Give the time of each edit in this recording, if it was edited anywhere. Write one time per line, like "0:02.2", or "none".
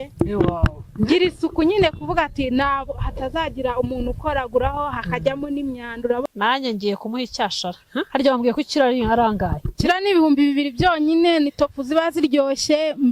0:06.2